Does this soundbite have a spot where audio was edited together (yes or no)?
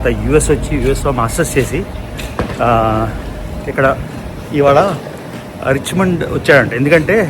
no